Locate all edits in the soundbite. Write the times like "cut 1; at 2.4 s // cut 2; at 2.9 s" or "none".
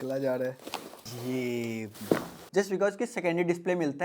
cut 1; at 2.4 s